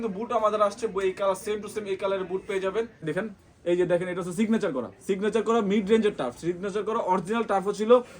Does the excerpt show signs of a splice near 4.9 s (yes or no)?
no